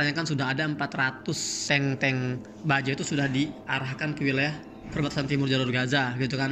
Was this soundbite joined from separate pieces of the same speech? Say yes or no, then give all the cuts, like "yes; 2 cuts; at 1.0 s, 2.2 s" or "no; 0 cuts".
yes; 1 cut; at 1.5 s